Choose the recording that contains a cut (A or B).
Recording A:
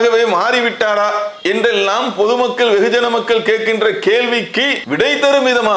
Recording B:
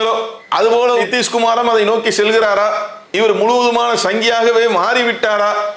A